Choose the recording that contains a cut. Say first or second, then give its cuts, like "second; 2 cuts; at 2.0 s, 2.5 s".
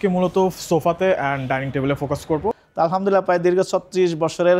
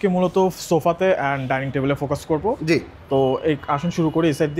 first; 1 cut; at 2.6 s